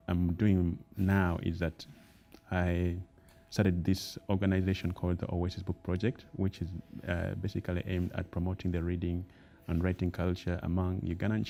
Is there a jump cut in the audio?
no; 0 cuts

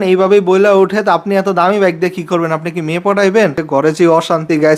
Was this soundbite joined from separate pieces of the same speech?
yes; 1 cut; at 3.6 s

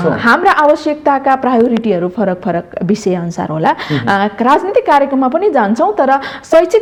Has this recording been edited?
no; 0 cuts

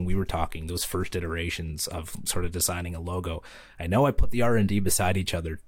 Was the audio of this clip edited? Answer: no; 0 cuts

